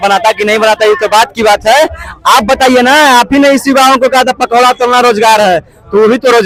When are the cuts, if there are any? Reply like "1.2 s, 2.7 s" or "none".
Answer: none